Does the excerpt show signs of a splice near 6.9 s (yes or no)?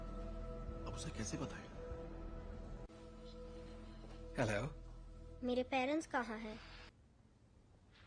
yes